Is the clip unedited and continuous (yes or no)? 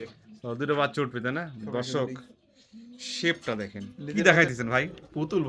no